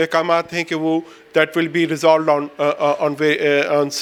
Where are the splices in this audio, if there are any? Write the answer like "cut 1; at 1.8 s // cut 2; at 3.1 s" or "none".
none